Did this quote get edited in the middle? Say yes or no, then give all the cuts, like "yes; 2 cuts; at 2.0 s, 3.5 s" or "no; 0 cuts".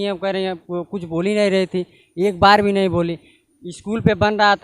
no; 0 cuts